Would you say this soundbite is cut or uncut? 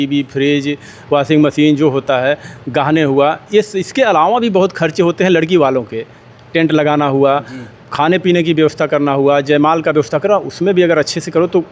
uncut